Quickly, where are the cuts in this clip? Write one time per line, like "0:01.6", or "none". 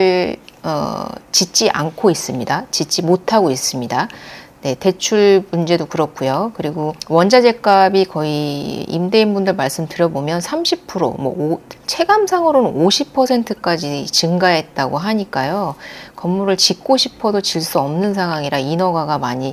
none